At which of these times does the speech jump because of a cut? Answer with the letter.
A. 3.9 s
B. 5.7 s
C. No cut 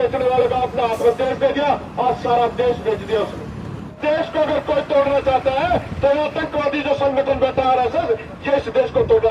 A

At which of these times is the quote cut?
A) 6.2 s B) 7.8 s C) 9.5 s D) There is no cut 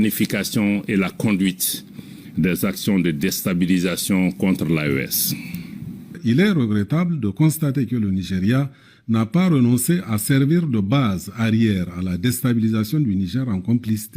A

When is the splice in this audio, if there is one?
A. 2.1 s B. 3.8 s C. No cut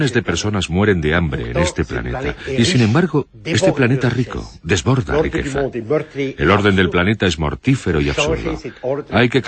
B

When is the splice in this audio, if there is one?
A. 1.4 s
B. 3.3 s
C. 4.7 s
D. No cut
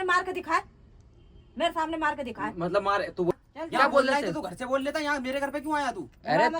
B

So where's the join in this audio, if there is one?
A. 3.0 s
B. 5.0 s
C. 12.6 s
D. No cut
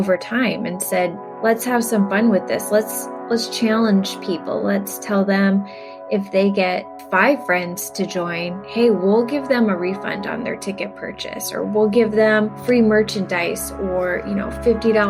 C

